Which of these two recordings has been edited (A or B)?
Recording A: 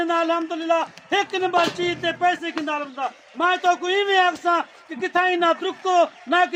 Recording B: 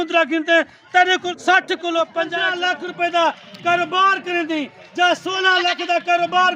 B